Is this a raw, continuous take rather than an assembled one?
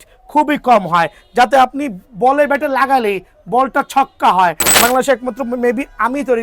no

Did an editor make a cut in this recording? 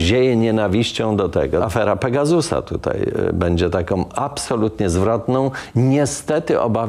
yes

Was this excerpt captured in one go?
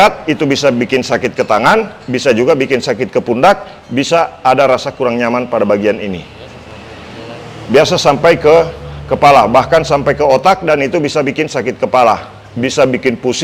yes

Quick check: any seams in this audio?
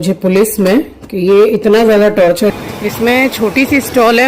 yes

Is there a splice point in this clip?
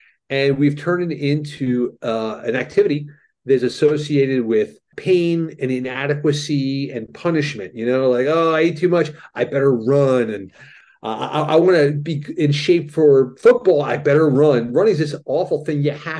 yes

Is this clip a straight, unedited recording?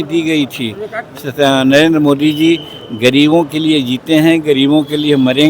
no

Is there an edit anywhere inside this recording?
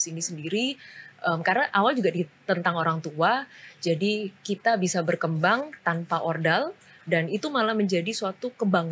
no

